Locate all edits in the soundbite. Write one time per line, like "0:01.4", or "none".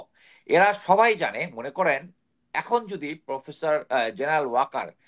none